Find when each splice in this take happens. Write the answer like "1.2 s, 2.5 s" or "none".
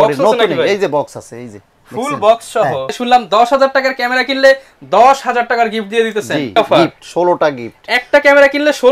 2.9 s, 6.6 s